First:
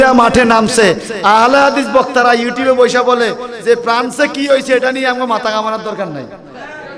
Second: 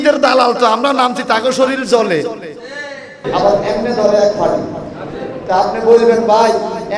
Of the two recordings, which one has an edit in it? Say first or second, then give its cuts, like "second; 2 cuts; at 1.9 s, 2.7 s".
second; 1 cut; at 3.2 s